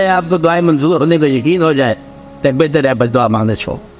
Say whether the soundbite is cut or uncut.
uncut